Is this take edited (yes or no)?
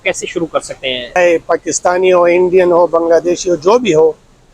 yes